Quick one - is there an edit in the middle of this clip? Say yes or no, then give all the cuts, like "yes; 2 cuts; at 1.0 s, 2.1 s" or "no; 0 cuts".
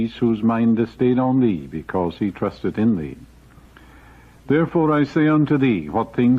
yes; 1 cut; at 3.2 s